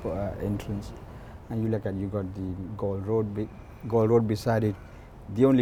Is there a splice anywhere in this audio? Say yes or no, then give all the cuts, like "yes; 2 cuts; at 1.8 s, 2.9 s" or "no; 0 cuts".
no; 0 cuts